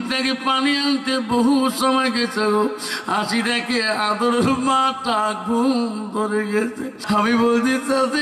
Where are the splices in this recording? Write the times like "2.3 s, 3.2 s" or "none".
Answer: 7.0 s